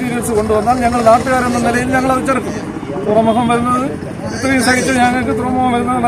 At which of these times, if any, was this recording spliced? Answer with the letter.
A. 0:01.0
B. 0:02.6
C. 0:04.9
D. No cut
D